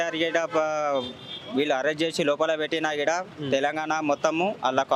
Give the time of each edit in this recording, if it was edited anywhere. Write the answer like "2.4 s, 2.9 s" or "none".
none